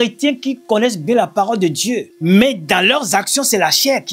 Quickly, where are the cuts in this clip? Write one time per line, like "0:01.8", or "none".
0:02.1